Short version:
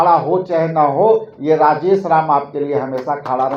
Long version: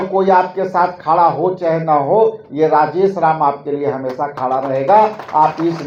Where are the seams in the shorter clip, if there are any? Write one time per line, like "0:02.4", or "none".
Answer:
none